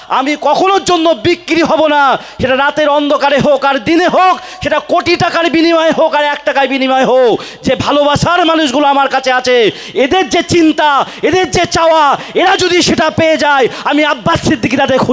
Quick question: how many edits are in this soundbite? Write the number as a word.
zero